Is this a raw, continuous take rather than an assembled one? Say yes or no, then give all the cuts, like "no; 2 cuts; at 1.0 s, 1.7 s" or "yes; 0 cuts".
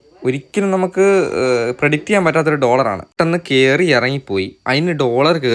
no; 1 cut; at 3.1 s